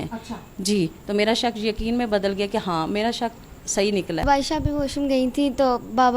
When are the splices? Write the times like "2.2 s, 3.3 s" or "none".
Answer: 4.2 s